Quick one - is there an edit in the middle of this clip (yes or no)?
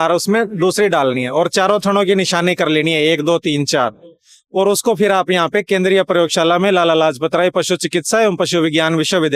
no